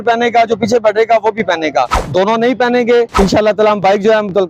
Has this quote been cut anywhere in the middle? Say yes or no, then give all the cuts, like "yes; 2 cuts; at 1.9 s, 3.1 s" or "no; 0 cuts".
yes; 2 cuts; at 2.0 s, 3.1 s